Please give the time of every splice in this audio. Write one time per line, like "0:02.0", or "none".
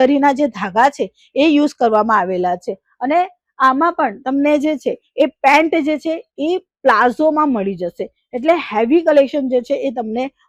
none